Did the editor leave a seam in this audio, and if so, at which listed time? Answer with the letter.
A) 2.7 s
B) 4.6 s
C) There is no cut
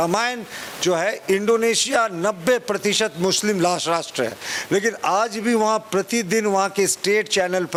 C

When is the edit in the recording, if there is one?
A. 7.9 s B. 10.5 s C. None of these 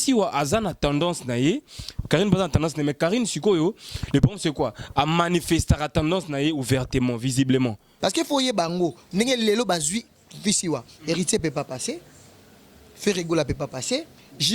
A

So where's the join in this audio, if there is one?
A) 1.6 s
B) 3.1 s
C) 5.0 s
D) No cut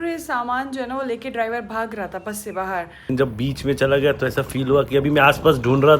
B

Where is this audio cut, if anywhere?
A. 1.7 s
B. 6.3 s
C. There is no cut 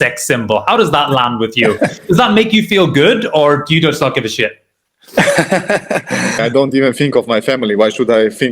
B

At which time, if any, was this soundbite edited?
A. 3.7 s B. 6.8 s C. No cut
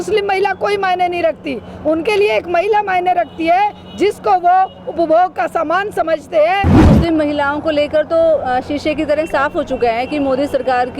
B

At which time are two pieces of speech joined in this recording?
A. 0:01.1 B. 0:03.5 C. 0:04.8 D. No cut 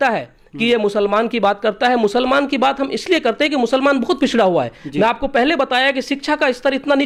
D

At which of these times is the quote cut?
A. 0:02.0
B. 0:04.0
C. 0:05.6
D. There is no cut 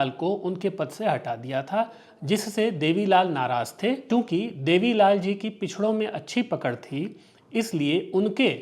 B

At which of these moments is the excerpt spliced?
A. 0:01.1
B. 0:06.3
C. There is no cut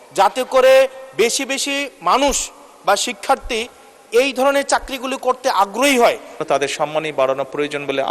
B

